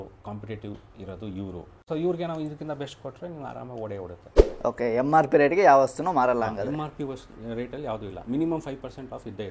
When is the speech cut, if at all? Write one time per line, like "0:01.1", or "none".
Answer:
0:01.7
0:04.5